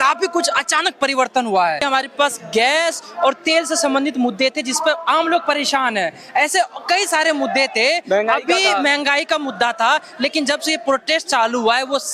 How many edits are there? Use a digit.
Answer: 1